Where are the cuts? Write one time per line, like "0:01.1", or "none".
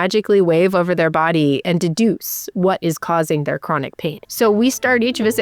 0:04.2